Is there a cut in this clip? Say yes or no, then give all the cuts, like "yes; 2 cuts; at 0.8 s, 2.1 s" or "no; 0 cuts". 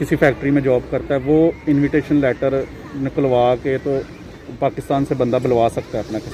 no; 0 cuts